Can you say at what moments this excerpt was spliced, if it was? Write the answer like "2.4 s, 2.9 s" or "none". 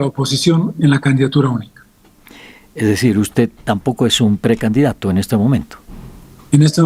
none